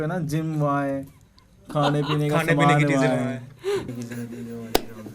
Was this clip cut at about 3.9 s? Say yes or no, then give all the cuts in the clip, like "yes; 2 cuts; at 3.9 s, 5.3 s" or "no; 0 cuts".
yes; 1 cut; at 3.9 s